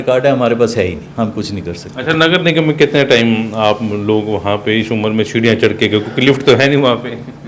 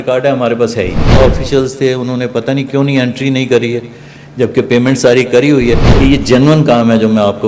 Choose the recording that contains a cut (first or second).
second